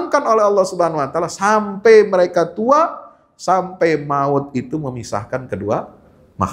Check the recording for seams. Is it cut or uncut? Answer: uncut